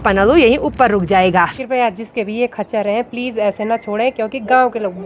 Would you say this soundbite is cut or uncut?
cut